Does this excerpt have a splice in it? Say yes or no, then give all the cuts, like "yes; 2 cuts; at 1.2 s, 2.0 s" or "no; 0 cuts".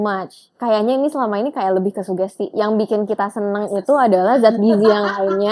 no; 0 cuts